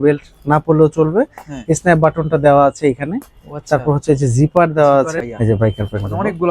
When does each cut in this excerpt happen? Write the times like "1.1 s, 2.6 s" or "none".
5.2 s